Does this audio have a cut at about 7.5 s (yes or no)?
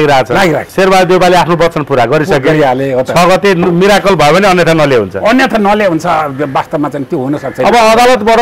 yes